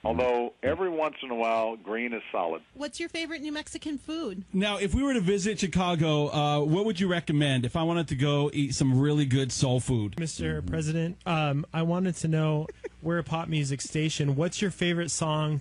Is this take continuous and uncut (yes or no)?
no